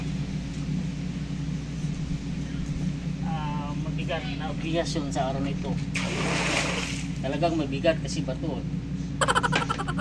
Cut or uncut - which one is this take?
uncut